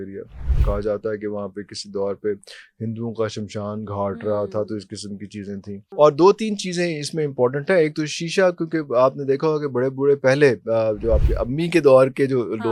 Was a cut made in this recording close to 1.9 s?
no; 1 cut; at 5.8 s

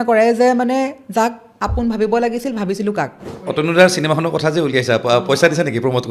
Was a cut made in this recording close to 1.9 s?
no; 1 cut; at 3.3 s

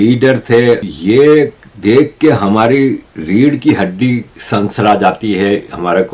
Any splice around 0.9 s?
yes; 1 cut; at 0.9 s

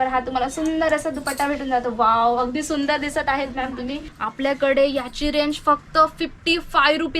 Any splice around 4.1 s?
yes; 1 cut; at 4.1 s

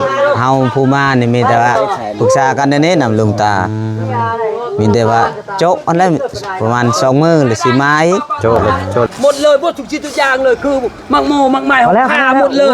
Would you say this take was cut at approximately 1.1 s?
no; 1 cut; at 9.1 s

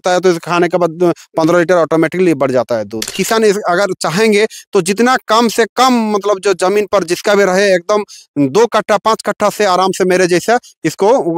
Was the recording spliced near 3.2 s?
yes; 1 cut; at 3.2 s

